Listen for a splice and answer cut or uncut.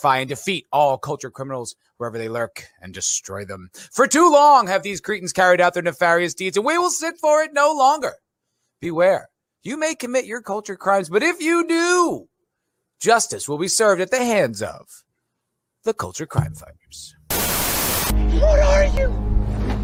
uncut